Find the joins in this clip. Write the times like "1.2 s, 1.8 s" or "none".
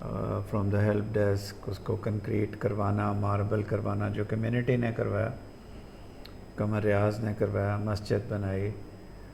none